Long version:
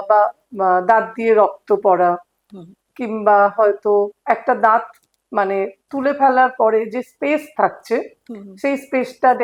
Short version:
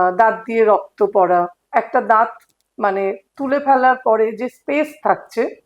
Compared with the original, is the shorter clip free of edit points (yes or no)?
no